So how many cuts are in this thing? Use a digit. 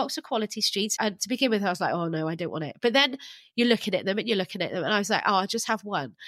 1